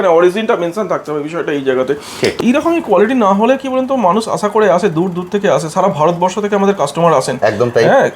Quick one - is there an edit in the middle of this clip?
yes; 1 cut; at 2.4 s

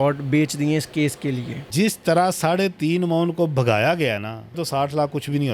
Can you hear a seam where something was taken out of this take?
yes; 2 cuts; at 1.6 s, 4.6 s

